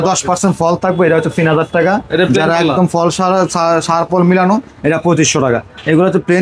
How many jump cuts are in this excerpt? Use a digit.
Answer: 0